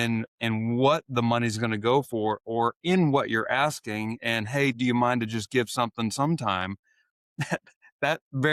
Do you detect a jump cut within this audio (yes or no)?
no